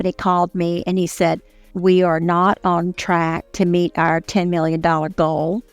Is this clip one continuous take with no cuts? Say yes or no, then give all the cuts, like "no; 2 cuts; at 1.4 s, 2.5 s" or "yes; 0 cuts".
no; 2 cuts; at 1.6 s, 3.5 s